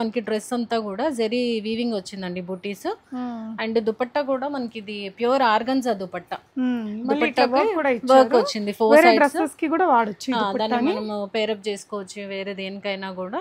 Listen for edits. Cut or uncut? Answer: uncut